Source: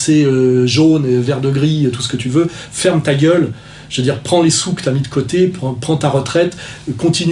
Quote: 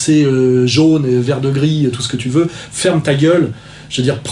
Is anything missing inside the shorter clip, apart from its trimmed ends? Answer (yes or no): no